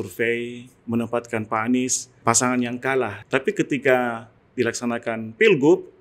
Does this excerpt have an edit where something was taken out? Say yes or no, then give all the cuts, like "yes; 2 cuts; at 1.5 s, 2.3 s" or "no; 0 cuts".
yes; 2 cuts; at 2.1 s, 3.2 s